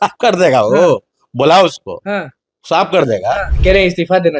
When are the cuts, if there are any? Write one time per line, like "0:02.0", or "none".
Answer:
0:03.5